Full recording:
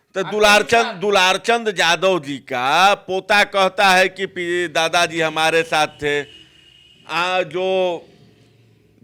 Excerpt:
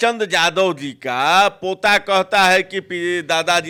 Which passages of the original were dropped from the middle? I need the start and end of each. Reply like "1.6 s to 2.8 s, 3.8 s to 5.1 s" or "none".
none